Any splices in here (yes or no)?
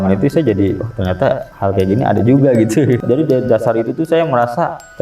yes